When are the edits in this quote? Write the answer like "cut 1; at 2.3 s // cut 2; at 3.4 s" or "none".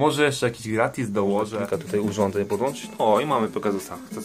cut 1; at 1.6 s